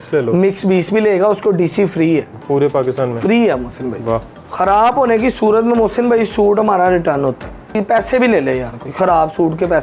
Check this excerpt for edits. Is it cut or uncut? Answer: cut